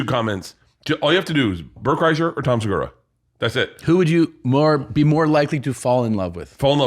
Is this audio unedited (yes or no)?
yes